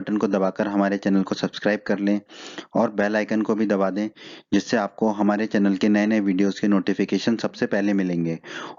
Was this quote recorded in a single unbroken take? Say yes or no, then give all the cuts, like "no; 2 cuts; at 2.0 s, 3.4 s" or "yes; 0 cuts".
yes; 0 cuts